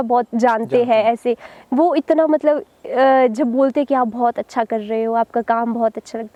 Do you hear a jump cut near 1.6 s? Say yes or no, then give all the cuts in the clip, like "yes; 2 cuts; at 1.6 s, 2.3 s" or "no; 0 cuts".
no; 0 cuts